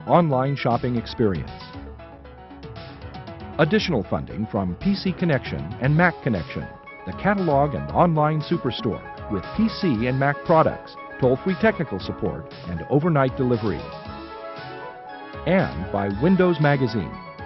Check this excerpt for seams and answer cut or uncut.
cut